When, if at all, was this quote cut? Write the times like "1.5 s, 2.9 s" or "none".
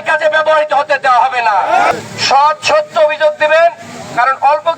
1.9 s